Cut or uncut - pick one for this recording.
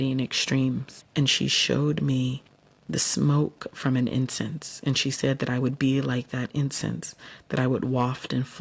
cut